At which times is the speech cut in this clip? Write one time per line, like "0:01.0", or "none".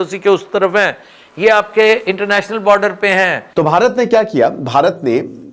0:03.4

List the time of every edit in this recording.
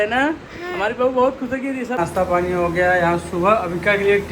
0:02.0

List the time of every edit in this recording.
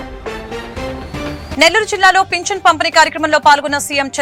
0:01.1

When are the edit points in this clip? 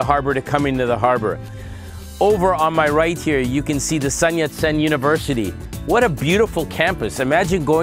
none

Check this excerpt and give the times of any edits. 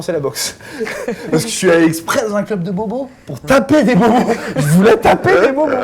none

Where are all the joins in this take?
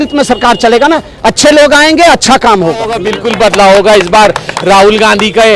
0:03.1

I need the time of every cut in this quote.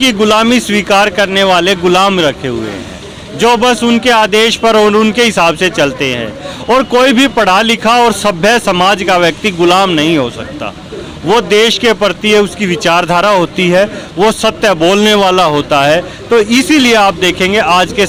none

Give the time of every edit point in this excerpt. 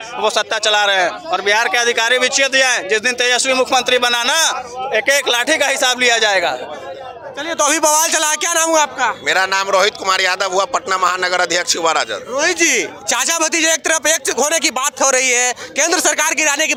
none

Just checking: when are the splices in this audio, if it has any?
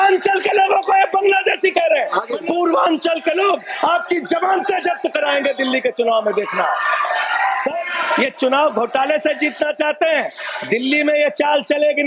0:02.3
0:07.8

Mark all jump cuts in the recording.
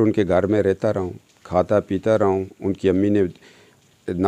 none

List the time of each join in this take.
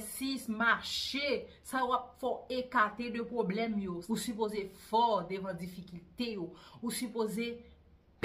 0:04.0

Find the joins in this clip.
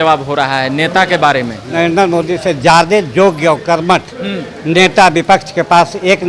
0:01.6

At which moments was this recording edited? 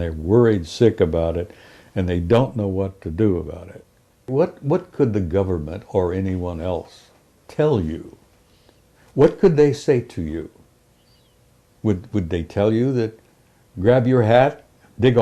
0:04.3

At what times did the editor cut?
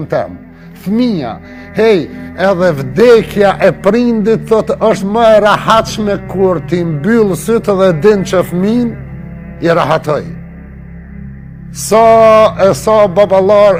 none

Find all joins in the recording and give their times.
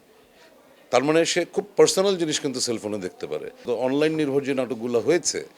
0:03.7

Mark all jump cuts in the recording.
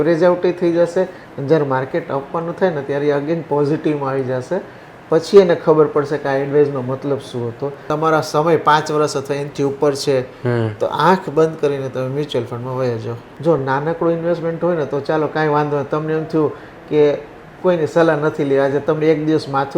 0:07.8
0:13.2

